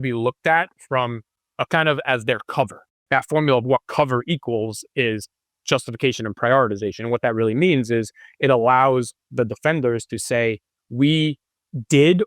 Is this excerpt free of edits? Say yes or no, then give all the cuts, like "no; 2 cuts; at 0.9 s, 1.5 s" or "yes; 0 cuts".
no; 2 cuts; at 1.5 s, 3.0 s